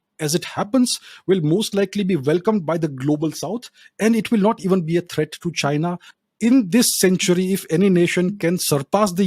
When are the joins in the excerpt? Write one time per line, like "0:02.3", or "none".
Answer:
0:06.1